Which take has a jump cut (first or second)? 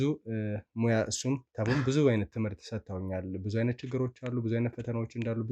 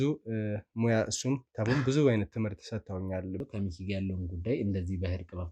second